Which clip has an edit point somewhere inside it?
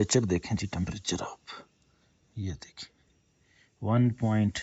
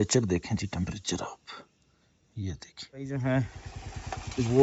second; 1 cut; at 3.2 s

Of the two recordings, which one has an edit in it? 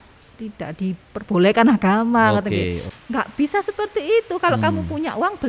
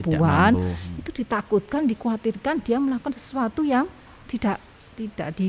first; 1 cut; at 2.9 s

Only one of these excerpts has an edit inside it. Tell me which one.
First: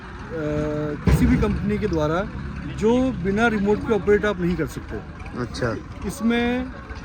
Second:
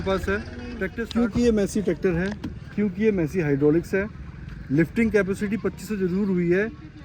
second; 1 cut; at 0.9 s

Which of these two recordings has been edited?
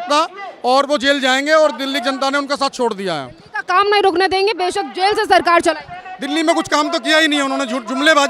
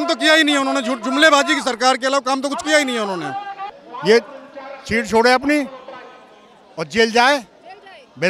second; 1 cut; at 3.8 s

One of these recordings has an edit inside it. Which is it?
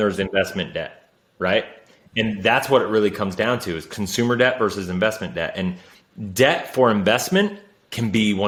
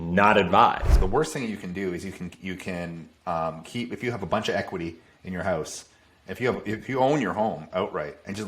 second; 1 cut; at 0.9 s

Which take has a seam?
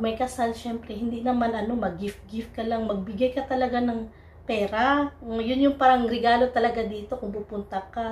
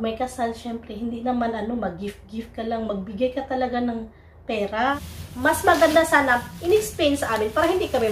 second; 1 cut; at 5.0 s

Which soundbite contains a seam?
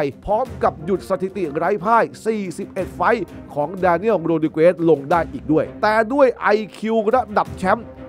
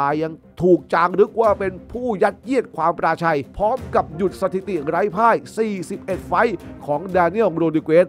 first; 1 cut; at 5.7 s

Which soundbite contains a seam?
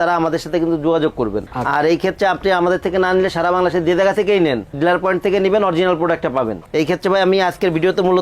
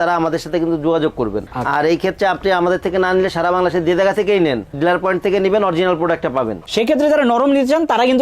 second; 1 cut; at 6.6 s

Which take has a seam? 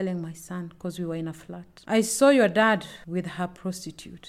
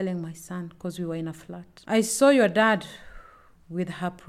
first; 1 cut; at 3.0 s

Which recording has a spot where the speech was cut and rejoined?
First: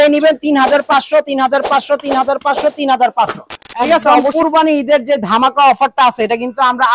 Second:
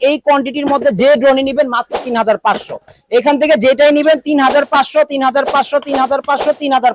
first; 1 cut; at 4.3 s

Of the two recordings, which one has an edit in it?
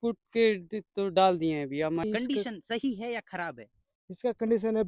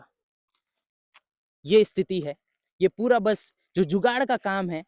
first; 1 cut; at 2.0 s

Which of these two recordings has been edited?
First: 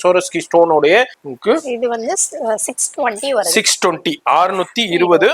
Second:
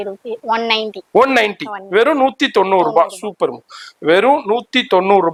first; 1 cut; at 1.2 s

